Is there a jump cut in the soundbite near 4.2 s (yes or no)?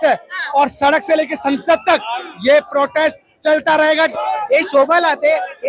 yes